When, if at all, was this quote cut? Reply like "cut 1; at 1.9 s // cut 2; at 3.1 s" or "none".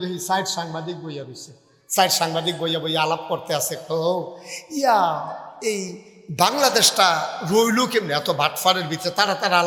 none